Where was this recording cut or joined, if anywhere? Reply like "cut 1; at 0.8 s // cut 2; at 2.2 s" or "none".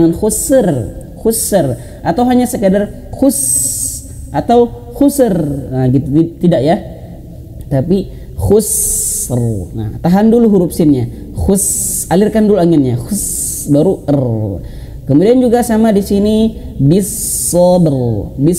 none